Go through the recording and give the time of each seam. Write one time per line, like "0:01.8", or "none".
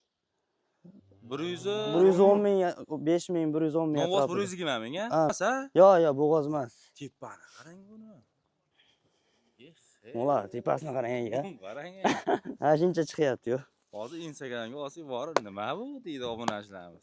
0:05.3